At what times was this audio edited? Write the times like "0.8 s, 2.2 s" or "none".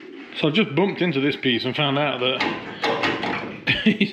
none